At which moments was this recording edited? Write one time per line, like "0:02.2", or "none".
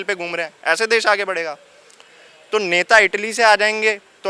none